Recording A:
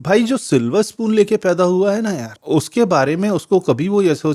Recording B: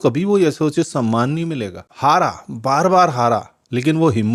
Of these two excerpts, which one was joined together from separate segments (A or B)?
B